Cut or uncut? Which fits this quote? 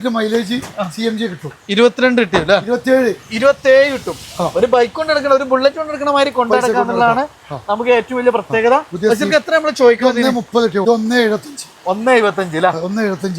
cut